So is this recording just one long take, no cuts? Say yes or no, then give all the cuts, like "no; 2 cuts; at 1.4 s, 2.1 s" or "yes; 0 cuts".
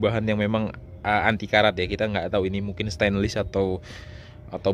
yes; 0 cuts